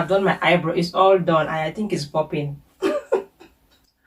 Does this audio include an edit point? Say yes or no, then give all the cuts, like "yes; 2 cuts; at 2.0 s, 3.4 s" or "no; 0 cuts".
no; 0 cuts